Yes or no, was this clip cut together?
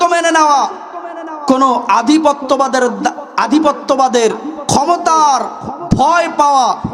no